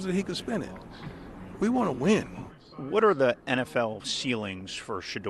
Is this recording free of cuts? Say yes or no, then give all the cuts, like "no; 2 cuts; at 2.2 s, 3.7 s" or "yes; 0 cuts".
yes; 0 cuts